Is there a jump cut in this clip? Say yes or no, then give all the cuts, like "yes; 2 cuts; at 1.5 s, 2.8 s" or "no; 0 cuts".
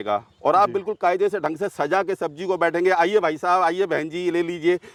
no; 0 cuts